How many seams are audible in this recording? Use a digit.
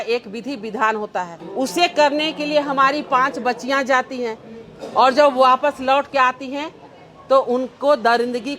0